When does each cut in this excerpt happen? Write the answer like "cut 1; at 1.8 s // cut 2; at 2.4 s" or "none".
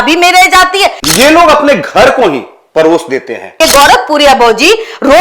cut 1; at 1.0 s // cut 2; at 3.5 s